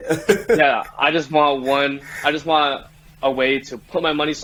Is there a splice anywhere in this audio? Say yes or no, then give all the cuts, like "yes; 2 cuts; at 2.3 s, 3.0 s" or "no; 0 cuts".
no; 0 cuts